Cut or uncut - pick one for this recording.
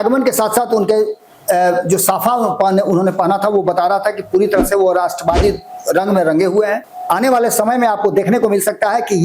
cut